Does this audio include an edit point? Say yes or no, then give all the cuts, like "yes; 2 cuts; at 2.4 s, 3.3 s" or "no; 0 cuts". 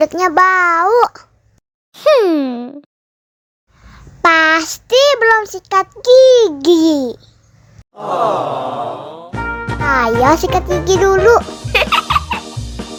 no; 0 cuts